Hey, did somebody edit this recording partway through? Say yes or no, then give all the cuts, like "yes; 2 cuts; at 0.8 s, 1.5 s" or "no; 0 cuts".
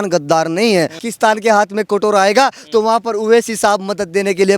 yes; 1 cut; at 1.0 s